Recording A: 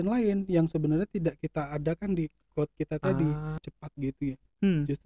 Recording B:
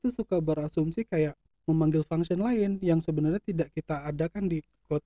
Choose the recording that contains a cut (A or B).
A